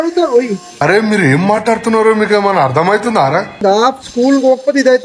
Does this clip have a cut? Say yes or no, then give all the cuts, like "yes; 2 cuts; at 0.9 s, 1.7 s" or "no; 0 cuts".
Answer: yes; 1 cut; at 3.5 s